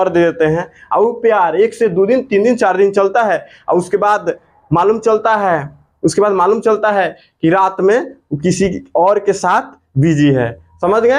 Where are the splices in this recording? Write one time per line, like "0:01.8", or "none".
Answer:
none